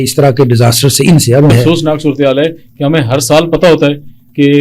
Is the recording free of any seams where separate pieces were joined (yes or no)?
no